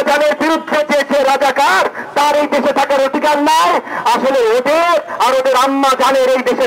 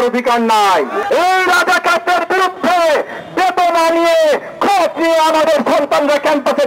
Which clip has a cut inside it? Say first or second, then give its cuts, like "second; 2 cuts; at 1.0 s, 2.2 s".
second; 1 cut; at 1.0 s